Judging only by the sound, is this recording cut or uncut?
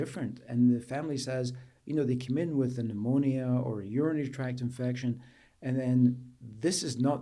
uncut